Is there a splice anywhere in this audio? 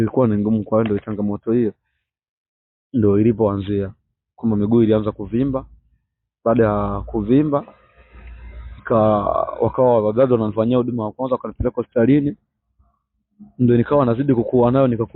no; 0 cuts

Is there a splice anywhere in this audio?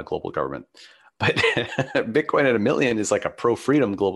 yes; 1 cut; at 1.2 s

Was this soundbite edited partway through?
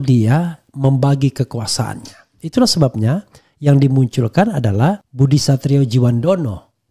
yes; 2 cuts; at 2.4 s, 5.1 s

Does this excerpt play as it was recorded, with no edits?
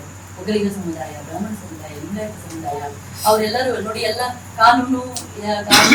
yes; 0 cuts

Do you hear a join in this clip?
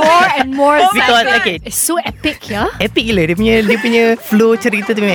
yes; 2 cuts; at 1.6 s, 4.2 s

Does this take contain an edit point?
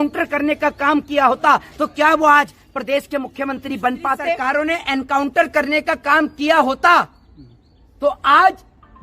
yes; 1 cut; at 4.4 s

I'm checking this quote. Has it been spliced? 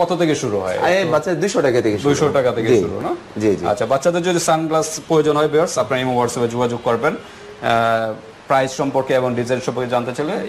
no; 0 cuts

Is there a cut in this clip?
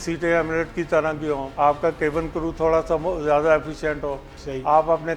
yes; 1 cut; at 1.5 s

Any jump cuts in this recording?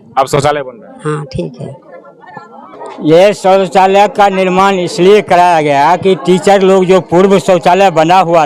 yes; 1 cut; at 2.9 s

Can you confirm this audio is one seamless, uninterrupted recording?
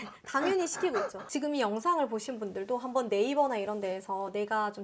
yes; 0 cuts

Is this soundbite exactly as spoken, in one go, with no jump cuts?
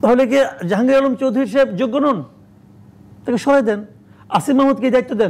yes; 0 cuts

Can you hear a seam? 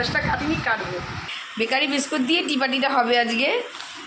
yes; 1 cut; at 1.4 s

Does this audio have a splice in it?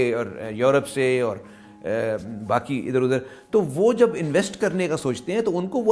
no; 0 cuts

